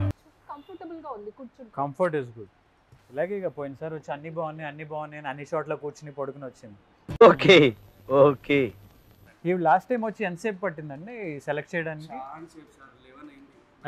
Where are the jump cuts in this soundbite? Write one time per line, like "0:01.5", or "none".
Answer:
0:09.3